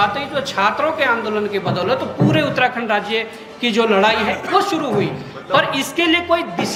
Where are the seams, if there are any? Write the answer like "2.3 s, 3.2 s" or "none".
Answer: none